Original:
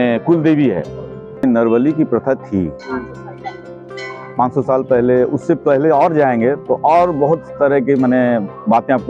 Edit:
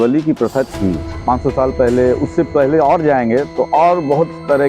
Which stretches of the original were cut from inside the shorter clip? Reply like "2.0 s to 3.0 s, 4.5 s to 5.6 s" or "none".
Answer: 2.8 s to 4.2 s